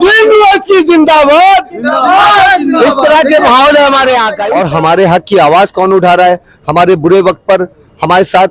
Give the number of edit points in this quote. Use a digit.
1